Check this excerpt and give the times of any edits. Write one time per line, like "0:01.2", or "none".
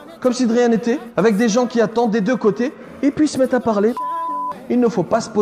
0:01.1
0:04.1

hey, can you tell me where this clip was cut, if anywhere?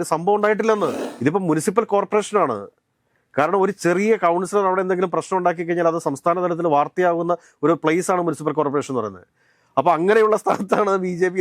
0:01.0

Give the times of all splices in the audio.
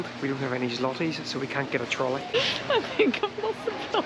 0:02.3

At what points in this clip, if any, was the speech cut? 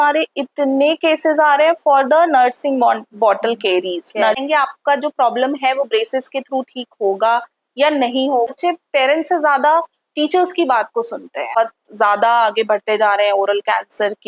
0:04.4
0:08.5
0:11.5

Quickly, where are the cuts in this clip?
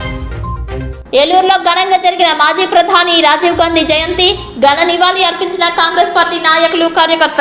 none

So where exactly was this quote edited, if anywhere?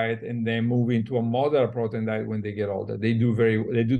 none

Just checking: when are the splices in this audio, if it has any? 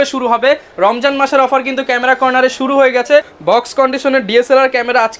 0:03.3

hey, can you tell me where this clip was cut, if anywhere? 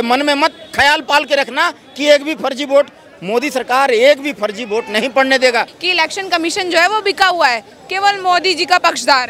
0:05.8

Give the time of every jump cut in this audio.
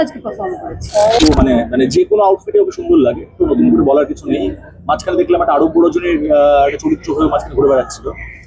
0:01.2

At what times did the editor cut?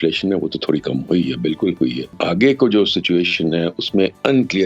0:02.2

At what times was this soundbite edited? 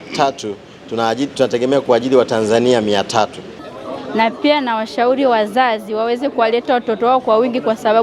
0:03.7

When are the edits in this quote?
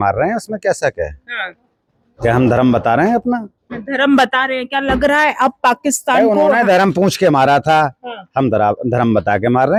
none

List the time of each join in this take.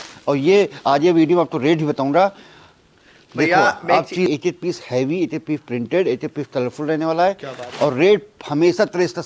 0:04.3

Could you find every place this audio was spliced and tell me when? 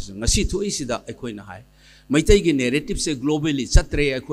none

